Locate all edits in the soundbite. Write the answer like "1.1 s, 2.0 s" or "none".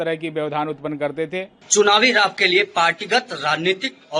1.6 s